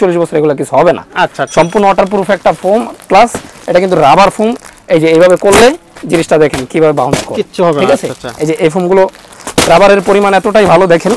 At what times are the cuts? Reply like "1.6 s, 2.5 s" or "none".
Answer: none